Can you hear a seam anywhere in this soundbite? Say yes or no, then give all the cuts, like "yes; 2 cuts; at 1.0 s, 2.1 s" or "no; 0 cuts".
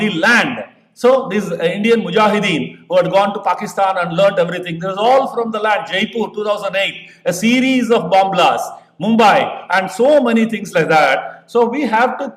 no; 0 cuts